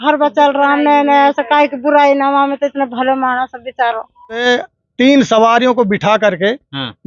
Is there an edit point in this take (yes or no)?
yes